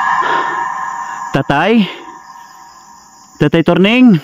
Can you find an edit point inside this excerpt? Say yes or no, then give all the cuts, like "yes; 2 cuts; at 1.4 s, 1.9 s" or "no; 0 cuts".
yes; 1 cut; at 1.2 s